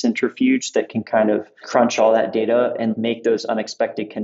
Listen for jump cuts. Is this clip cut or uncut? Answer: cut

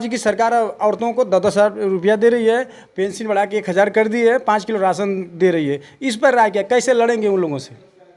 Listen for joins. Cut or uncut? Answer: uncut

